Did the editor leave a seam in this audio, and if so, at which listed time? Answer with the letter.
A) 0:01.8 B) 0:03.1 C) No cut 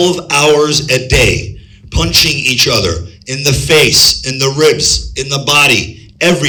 C